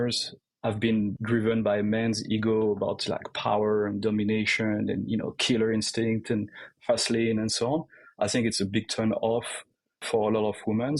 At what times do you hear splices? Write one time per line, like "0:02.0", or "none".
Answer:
0:01.1